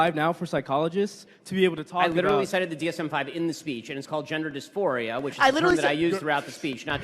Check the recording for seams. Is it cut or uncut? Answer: uncut